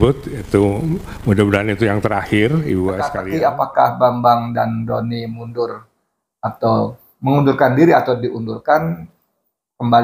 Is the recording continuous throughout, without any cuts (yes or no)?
no